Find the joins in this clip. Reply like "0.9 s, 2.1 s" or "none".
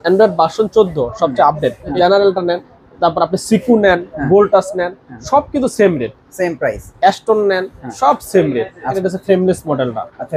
2.0 s, 9.0 s